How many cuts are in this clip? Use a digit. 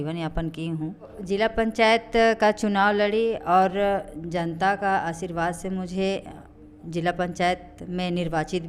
1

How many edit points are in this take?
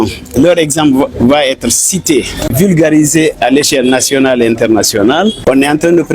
2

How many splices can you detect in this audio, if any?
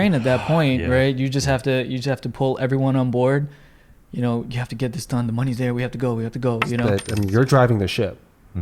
1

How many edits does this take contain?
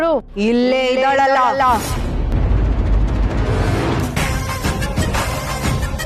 0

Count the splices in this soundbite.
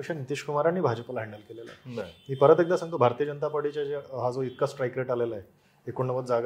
0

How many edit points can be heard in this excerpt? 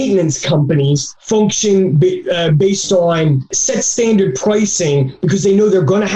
1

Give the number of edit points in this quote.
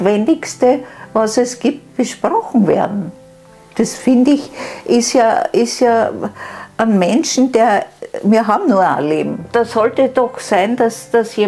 1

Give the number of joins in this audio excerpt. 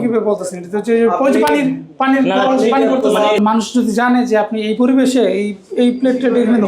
1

